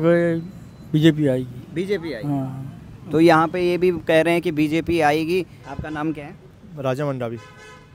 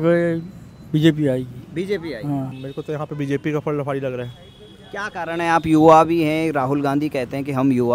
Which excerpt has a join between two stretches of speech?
second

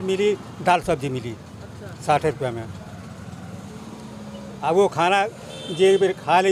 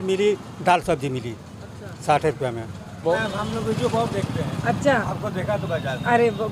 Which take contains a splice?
second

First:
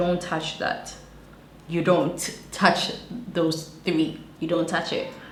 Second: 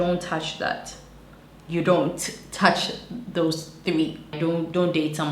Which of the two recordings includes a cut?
second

